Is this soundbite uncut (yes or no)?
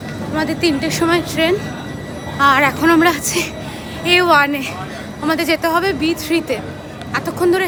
yes